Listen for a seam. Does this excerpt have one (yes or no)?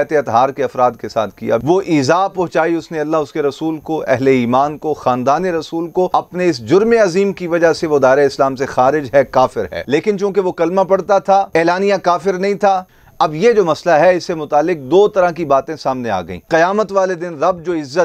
yes